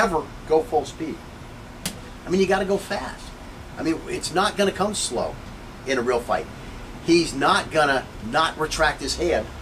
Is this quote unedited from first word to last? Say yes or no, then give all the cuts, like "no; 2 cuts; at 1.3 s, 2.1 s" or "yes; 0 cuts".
yes; 0 cuts